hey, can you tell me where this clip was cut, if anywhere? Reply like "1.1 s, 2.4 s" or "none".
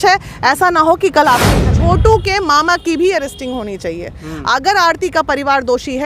1.7 s